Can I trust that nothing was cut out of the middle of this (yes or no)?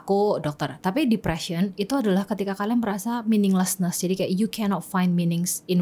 yes